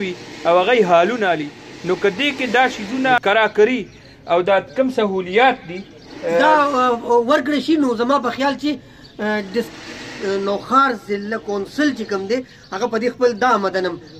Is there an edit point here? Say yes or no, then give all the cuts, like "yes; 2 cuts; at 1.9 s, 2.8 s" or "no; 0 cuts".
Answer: yes; 1 cut; at 3.2 s